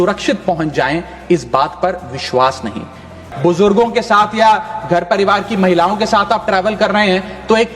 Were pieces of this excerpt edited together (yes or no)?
yes